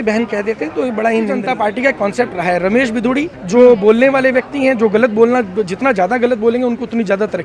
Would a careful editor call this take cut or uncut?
cut